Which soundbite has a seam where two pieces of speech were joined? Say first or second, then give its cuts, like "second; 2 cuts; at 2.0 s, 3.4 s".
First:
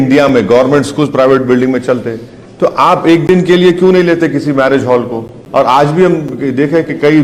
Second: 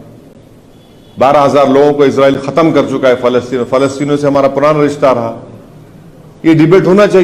first; 1 cut; at 5.3 s